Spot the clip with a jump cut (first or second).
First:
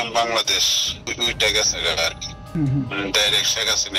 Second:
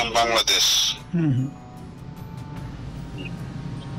first